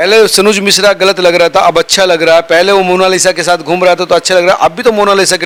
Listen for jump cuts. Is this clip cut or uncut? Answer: uncut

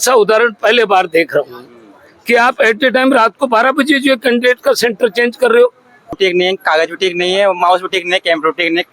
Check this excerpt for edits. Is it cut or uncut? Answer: cut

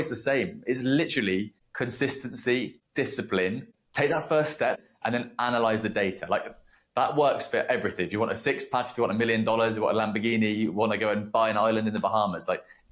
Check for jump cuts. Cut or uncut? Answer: cut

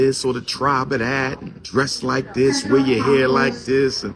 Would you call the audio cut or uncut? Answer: cut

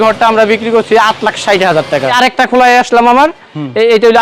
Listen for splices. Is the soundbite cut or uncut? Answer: cut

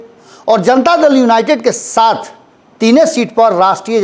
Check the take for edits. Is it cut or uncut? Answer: uncut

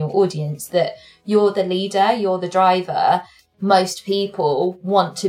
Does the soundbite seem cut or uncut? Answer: cut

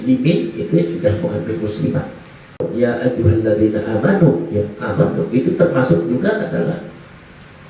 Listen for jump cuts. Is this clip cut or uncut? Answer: cut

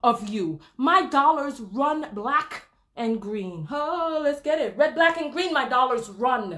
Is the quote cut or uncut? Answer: uncut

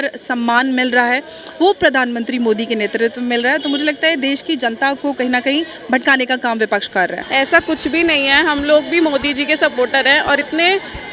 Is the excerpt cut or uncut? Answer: cut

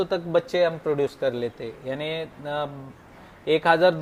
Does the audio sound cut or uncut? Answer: uncut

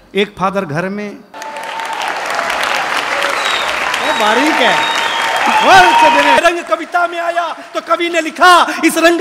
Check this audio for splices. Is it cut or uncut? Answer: cut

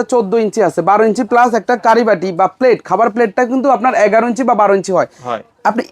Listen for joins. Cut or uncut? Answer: uncut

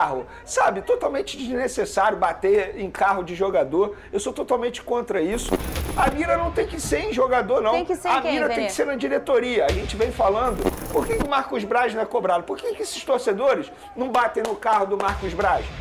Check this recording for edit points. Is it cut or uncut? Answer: cut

